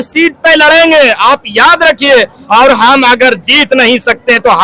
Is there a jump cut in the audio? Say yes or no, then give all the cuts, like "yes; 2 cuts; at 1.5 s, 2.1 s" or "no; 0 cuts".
no; 0 cuts